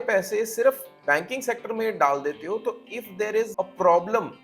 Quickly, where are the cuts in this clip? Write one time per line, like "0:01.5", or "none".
0:03.5

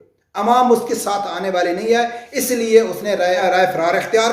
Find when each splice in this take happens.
0:03.4

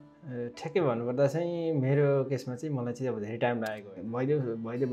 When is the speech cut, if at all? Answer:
0:03.9

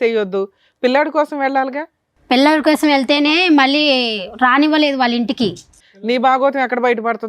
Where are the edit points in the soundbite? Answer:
0:05.7

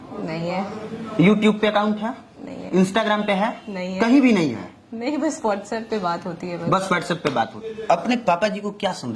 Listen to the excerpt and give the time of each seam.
0:07.7

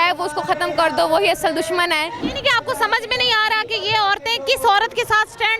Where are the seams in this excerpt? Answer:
0:02.2

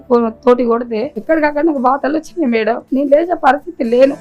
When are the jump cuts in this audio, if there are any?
0:01.1
0:02.8

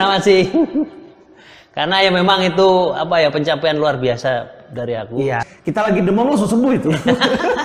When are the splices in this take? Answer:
0:05.4

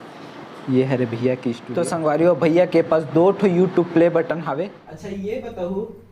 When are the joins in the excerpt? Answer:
0:01.6
0:04.6

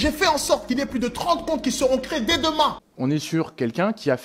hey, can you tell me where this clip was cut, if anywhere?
0:02.9

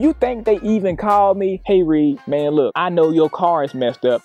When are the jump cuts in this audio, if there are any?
none

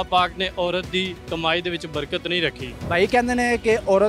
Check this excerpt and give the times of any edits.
0:01.2
0:02.7

